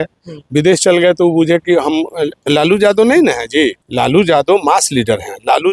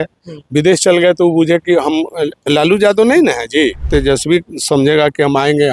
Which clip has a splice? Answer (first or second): second